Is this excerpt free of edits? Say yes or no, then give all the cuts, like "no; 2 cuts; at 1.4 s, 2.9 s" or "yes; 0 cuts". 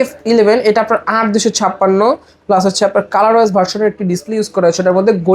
yes; 0 cuts